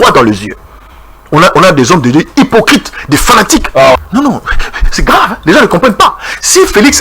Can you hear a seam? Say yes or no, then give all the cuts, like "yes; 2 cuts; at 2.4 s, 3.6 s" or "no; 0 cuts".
yes; 1 cut; at 4.0 s